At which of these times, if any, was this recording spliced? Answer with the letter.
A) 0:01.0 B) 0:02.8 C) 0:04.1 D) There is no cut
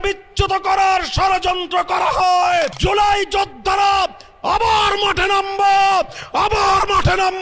B